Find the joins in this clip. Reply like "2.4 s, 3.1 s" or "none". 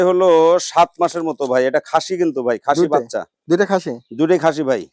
none

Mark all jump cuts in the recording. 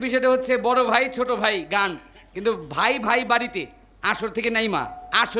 none

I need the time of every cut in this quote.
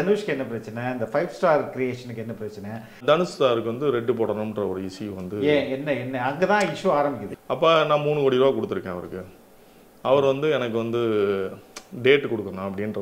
3.0 s, 7.3 s

